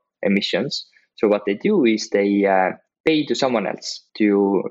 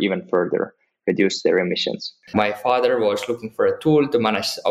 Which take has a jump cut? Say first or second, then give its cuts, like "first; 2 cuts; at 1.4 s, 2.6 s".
second; 1 cut; at 2.2 s